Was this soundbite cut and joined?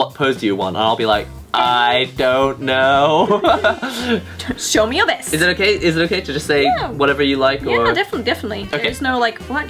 no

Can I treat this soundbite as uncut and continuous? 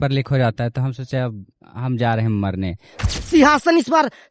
no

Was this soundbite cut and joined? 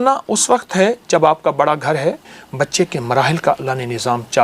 yes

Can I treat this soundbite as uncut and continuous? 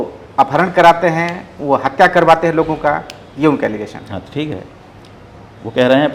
yes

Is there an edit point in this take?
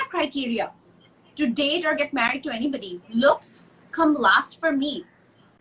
no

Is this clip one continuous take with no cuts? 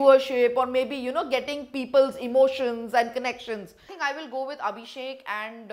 no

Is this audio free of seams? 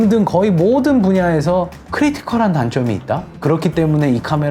no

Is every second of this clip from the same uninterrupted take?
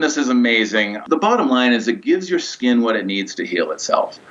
no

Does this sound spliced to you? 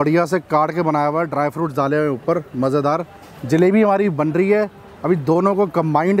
no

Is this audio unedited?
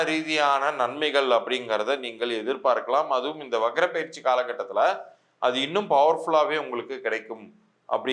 yes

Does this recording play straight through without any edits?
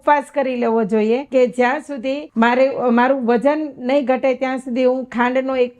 no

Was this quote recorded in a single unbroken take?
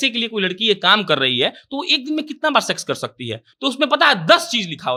yes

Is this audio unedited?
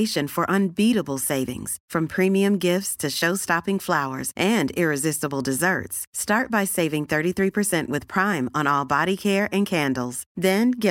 yes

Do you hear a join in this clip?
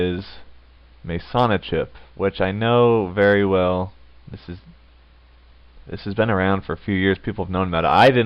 yes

